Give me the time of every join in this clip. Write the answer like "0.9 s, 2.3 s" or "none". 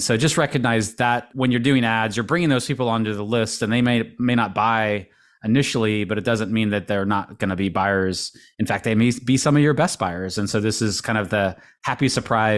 1.3 s